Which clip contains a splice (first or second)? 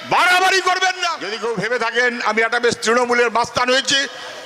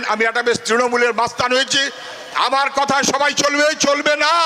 first